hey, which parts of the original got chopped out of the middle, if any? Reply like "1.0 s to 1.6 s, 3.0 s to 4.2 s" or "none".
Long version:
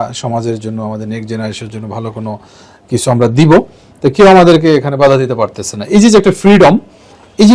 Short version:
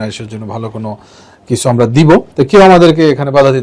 3.7 s to 3.9 s